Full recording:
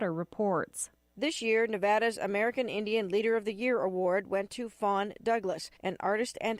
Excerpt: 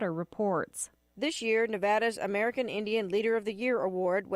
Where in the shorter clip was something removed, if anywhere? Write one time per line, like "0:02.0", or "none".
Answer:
none